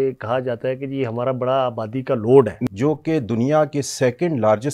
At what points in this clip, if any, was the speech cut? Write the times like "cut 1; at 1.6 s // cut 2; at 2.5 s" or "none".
cut 1; at 2.6 s